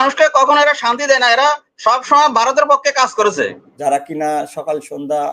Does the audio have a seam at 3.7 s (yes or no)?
yes